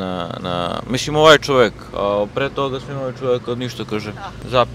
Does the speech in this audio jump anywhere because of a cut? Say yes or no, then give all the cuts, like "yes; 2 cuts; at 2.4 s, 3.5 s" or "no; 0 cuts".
no; 0 cuts